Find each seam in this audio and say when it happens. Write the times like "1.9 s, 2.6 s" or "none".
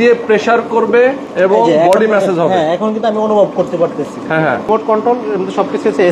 1.2 s, 4.7 s